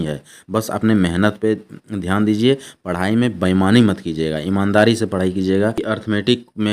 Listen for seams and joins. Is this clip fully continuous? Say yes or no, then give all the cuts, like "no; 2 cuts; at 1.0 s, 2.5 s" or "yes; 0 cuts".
no; 1 cut; at 5.8 s